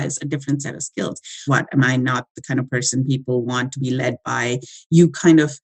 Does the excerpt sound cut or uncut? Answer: cut